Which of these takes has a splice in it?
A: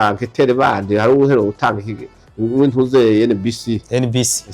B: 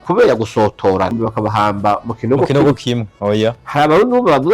B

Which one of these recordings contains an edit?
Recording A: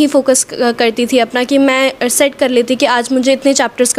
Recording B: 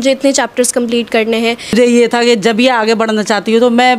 B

